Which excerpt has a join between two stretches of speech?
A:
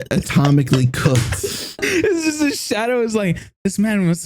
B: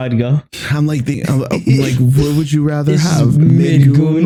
A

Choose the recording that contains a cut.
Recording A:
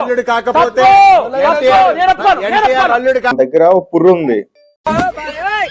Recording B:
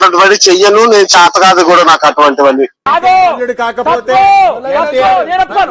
A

